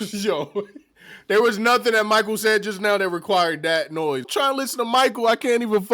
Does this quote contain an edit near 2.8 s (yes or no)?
no